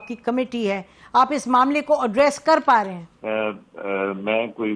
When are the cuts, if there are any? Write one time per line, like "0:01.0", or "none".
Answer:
0:03.1